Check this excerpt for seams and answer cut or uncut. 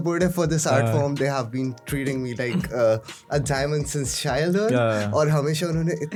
uncut